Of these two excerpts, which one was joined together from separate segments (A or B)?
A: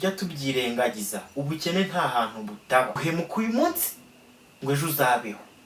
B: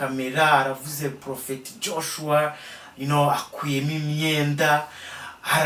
A